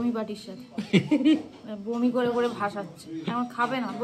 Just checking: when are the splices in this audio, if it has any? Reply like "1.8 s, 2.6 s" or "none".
none